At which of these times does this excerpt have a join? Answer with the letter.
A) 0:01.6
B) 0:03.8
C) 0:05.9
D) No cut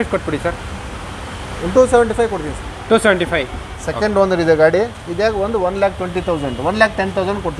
B